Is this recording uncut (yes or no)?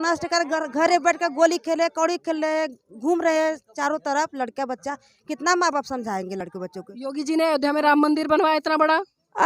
yes